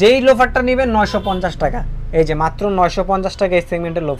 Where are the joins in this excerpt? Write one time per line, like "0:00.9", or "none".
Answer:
none